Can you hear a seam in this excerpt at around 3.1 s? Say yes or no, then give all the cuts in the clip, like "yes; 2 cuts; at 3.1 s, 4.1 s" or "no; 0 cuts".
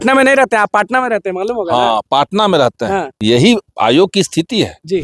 yes; 1 cut; at 3.1 s